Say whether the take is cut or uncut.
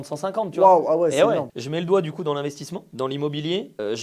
cut